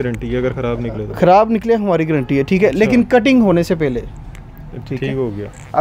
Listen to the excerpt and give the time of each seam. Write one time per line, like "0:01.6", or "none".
none

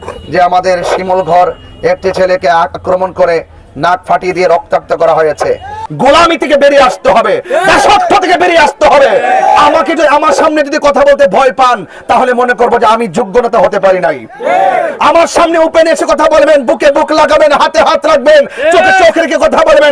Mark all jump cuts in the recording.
0:05.8

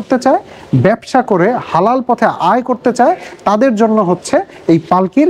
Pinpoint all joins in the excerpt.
none

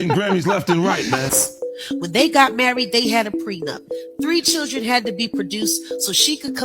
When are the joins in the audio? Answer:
0:01.3

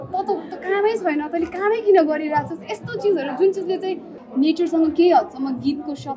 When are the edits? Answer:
0:04.1

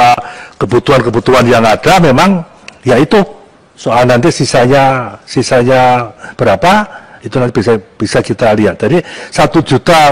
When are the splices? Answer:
none

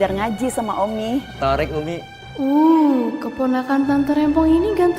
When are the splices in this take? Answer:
0:01.3
0:02.2

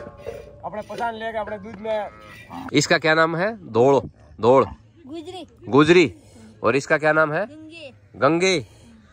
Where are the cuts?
0:02.6

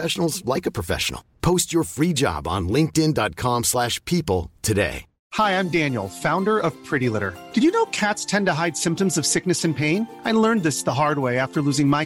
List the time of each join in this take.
0:05.1

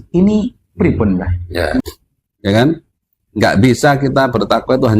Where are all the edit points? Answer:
0:01.8

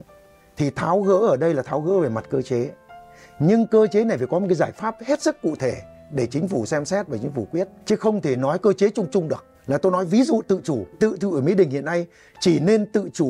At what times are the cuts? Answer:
0:07.8
0:09.5
0:10.9

